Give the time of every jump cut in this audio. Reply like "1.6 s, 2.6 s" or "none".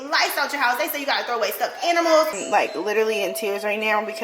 2.4 s